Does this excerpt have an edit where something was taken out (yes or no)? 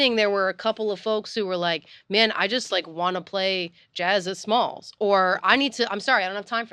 no